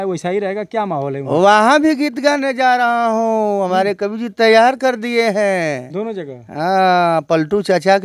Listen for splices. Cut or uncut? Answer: uncut